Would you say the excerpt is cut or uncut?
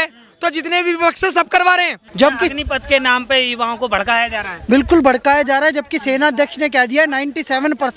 cut